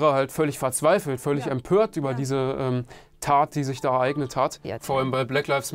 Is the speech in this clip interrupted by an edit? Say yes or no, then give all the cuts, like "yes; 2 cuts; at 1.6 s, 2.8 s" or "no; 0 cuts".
yes; 1 cut; at 4.6 s